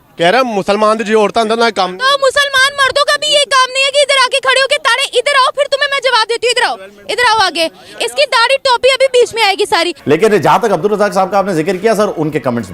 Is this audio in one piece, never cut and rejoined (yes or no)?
no